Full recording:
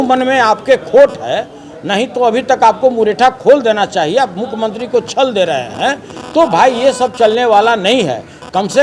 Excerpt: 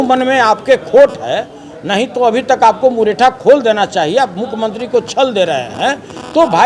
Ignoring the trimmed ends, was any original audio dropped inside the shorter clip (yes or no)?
no